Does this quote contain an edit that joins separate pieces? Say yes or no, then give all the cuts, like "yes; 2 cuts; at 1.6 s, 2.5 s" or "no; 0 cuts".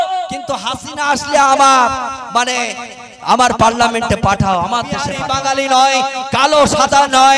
yes; 1 cut; at 5.2 s